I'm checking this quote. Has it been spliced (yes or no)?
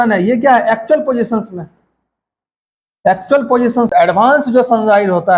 yes